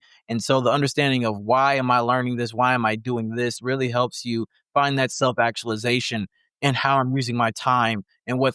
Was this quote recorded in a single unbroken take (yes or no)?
yes